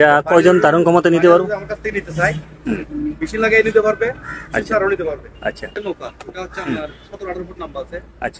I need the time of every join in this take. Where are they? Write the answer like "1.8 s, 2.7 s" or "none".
5.7 s